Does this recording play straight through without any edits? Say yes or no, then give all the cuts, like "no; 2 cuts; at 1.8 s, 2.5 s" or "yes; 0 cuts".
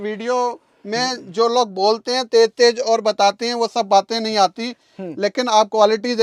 yes; 0 cuts